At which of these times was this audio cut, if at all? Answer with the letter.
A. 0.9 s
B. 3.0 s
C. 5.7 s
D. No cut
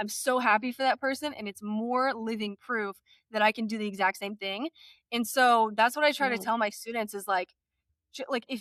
D